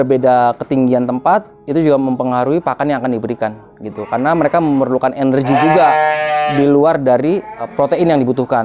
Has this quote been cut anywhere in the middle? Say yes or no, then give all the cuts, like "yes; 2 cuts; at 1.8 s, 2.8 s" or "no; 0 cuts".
yes; 1 cut; at 7.7 s